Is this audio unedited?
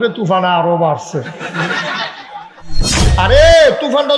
no; 1 cut; at 3.0 s

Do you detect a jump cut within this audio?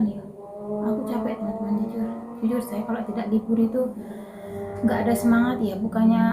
yes; 1 cut; at 2.2 s

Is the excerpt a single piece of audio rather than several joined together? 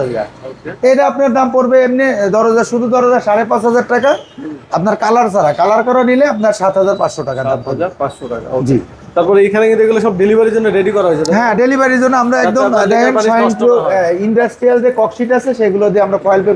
yes; 0 cuts

